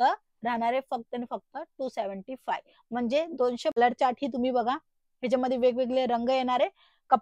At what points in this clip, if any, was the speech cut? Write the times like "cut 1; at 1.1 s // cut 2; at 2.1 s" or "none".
cut 1; at 3.8 s